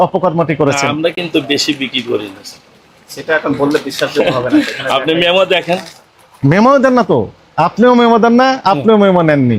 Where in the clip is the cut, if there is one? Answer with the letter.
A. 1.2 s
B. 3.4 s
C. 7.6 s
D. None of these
D